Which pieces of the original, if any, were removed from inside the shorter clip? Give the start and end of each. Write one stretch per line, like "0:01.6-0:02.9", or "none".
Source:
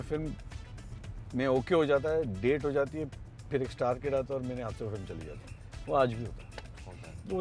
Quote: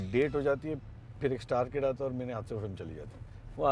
none